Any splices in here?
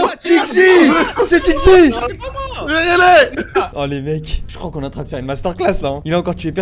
no; 0 cuts

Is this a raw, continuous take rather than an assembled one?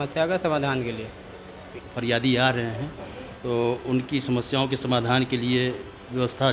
no; 1 cut; at 1.8 s

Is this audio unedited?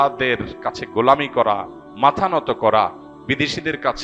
yes; 0 cuts

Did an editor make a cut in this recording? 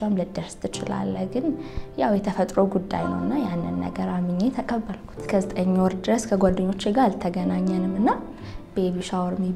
yes; 1 cut; at 5.2 s

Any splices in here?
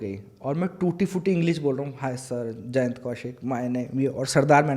no; 0 cuts

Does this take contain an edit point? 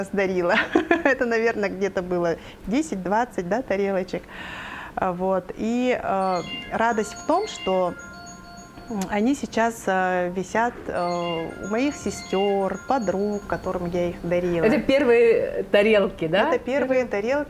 no; 0 cuts

